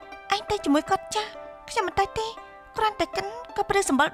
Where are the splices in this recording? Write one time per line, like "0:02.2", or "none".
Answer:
none